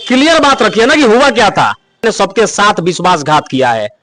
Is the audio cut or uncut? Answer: cut